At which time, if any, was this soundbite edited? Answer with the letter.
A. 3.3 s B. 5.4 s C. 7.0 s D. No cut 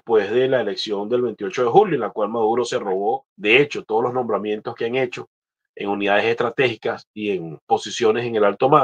A